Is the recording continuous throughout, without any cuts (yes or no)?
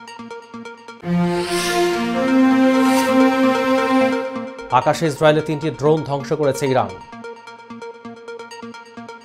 yes